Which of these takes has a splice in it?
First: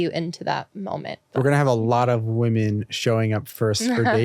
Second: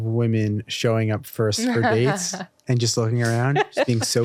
first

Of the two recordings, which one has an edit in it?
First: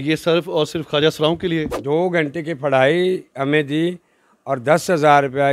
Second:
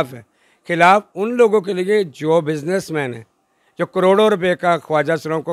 first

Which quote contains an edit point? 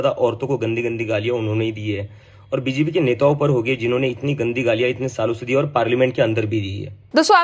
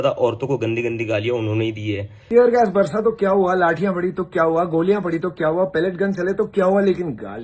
second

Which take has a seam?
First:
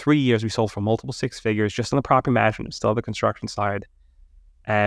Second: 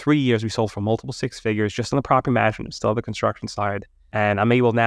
second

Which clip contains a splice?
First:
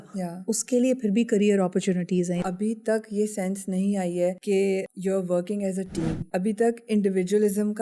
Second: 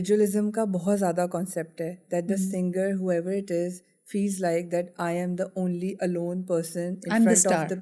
first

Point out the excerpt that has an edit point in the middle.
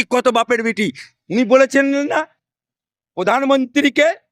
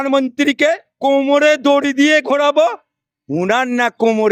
first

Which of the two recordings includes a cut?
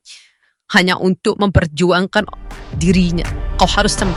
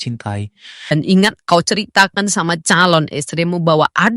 second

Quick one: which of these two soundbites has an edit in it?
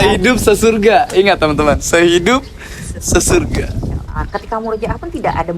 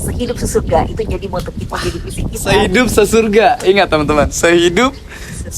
first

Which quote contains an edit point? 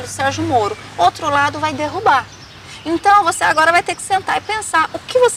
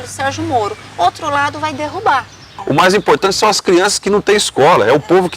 second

